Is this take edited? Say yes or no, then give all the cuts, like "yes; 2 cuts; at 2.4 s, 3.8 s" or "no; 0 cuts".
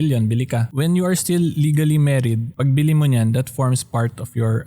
yes; 1 cut; at 2.5 s